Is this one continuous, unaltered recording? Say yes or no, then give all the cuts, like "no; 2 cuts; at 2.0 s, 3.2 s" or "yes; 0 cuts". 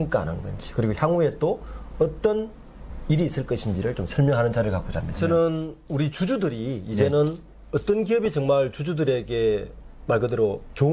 no; 1 cut; at 5.1 s